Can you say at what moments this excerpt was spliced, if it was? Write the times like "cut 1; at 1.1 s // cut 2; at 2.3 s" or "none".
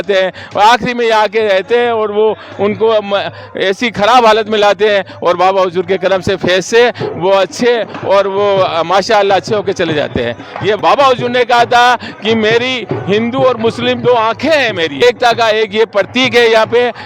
cut 1; at 10.8 s // cut 2; at 15.0 s